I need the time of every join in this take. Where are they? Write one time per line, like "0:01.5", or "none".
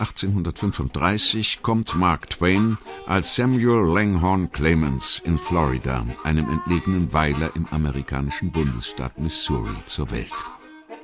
0:09.3